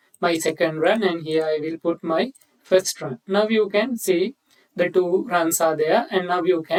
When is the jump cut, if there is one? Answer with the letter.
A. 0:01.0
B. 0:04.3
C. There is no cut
C